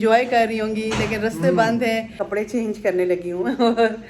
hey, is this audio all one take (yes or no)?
no